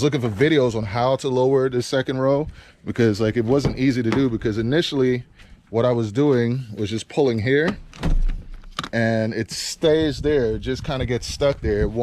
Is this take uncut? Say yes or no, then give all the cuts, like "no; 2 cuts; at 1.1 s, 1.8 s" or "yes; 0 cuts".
yes; 0 cuts